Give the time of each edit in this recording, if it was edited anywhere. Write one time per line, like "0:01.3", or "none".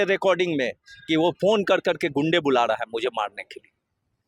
none

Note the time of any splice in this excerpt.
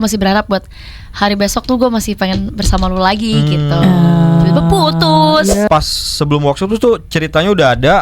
0:05.7

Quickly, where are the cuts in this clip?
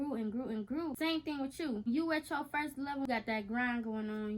0:00.9
0:01.9
0:03.1

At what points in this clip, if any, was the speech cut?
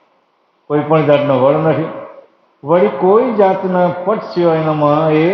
none

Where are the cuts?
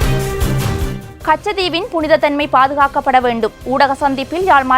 0:01.0

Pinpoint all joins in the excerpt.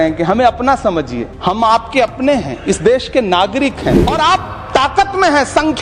0:01.2
0:04.0

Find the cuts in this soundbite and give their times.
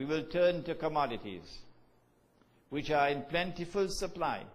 0:02.1

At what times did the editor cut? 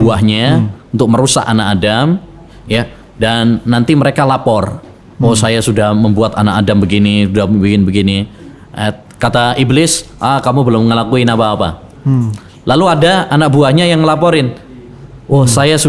none

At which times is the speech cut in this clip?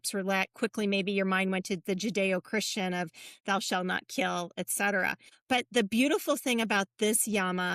0:05.3

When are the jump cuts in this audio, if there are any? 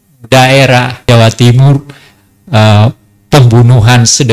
0:01.0

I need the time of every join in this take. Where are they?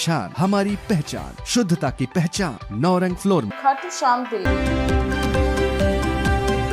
0:04.4

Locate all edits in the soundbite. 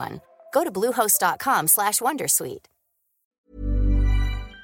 0:03.4

